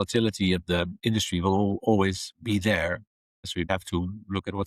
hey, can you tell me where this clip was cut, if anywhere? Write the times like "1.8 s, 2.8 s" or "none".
3.7 s